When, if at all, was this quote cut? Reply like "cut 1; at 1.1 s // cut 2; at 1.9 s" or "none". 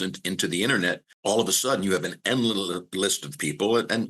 cut 1; at 1.1 s